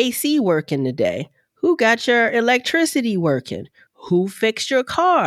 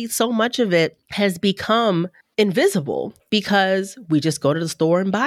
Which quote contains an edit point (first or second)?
second